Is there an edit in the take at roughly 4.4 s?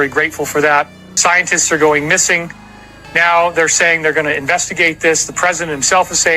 no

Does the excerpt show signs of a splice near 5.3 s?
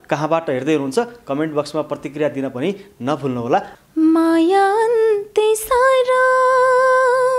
no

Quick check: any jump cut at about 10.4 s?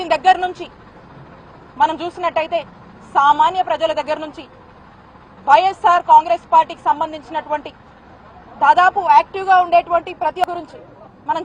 yes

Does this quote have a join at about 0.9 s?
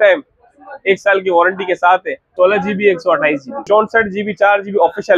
no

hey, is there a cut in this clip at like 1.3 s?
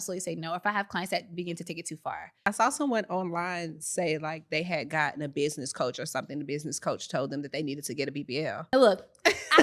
no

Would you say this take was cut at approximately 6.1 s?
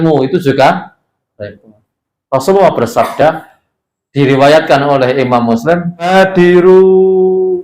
yes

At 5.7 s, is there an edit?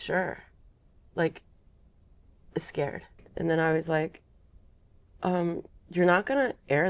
no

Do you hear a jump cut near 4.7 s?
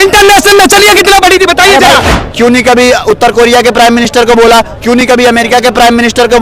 no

